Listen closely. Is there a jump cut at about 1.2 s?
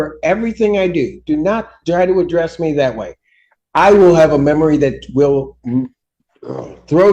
no; 0 cuts

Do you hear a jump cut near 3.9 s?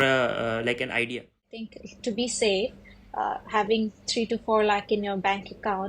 no; 1 cut; at 1.9 s

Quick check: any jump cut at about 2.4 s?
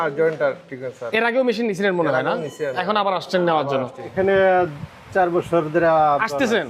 no; 1 cut; at 4.0 s

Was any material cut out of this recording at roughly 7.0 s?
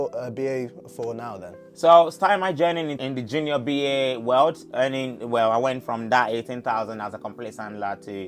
no; 1 cut; at 2.9 s

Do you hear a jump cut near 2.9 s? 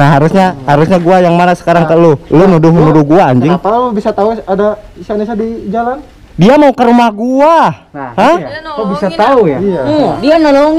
no; 0 cuts

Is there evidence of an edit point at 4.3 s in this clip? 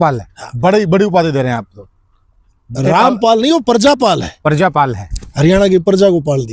no; 0 cuts

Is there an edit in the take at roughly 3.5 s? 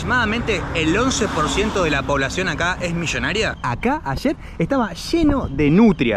yes; 1 cut; at 3.5 s

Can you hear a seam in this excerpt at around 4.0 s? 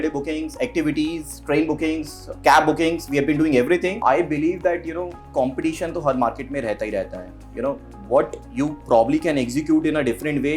yes; 1 cut; at 4.0 s

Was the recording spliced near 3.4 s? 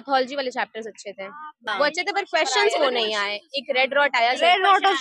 no; 1 cut; at 1.5 s

